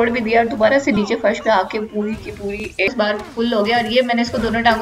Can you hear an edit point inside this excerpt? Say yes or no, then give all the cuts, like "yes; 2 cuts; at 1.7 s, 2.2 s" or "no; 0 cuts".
yes; 1 cut; at 2.9 s